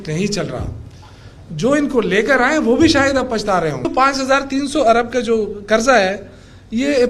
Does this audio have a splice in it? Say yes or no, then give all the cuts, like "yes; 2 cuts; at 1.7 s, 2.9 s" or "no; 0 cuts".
yes; 1 cut; at 3.9 s